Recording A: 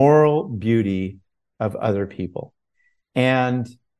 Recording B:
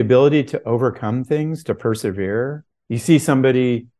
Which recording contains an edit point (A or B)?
B